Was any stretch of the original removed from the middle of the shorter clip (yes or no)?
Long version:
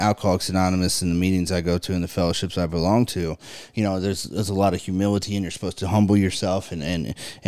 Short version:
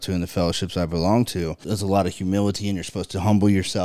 yes